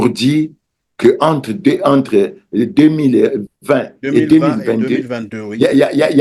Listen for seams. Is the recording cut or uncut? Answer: uncut